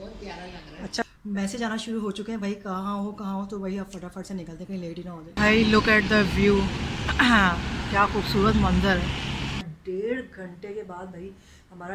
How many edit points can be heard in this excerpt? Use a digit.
3